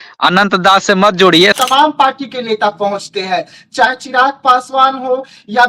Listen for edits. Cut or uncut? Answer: cut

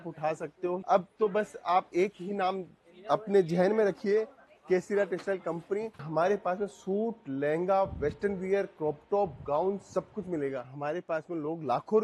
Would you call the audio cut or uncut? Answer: cut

